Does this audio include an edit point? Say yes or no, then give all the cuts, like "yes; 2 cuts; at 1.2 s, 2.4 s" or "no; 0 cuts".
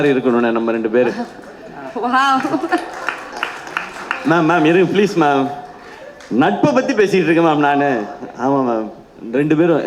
no; 0 cuts